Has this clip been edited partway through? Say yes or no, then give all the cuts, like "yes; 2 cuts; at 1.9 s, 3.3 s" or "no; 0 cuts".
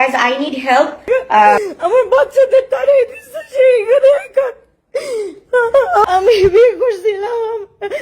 yes; 2 cuts; at 1.7 s, 6.0 s